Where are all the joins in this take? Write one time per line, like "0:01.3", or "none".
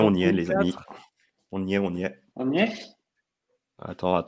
0:02.2